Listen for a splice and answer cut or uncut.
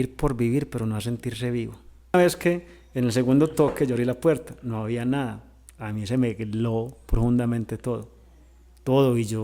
cut